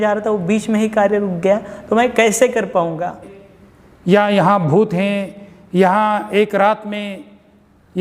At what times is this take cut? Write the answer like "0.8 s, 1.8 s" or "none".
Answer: 3.3 s